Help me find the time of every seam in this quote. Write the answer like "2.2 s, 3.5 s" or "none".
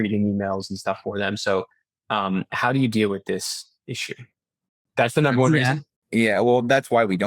none